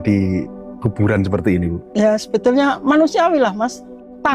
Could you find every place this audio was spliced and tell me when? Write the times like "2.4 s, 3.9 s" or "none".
none

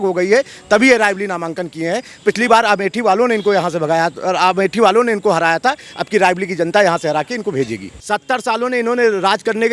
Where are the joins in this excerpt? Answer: 7.9 s

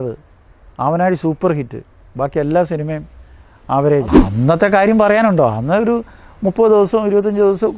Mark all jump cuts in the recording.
4.2 s

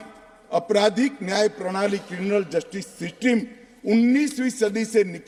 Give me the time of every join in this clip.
none

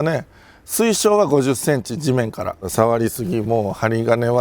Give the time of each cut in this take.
2.7 s

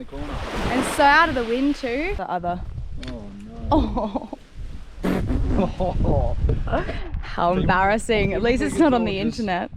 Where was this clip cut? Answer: 2.2 s

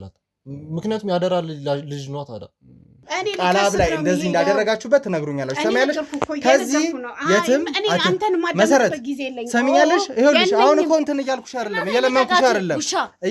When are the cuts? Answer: 3.0 s

